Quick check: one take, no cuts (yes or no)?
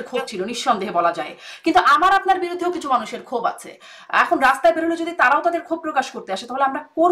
yes